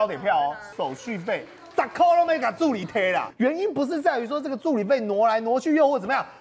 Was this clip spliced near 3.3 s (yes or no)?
yes